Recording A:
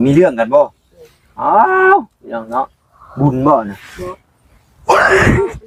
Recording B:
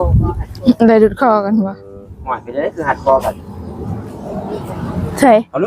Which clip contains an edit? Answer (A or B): B